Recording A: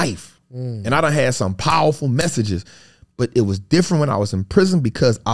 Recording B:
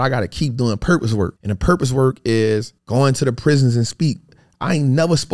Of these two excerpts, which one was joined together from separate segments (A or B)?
B